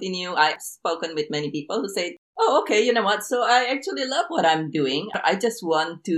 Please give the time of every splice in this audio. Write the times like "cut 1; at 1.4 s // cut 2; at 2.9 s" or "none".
cut 1; at 5.1 s